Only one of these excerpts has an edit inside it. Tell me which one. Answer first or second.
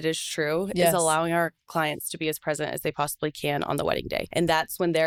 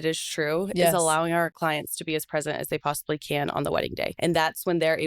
second